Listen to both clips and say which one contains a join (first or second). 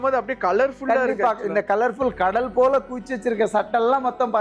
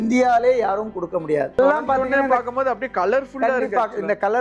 second